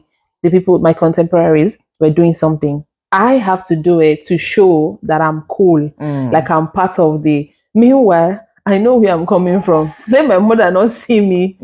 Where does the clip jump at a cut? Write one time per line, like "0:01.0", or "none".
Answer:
none